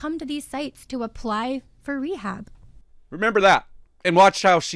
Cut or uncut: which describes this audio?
uncut